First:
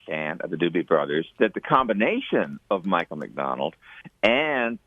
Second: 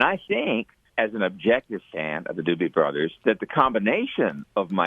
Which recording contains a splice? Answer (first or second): second